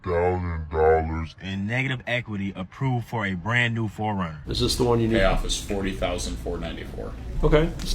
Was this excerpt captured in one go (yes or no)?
no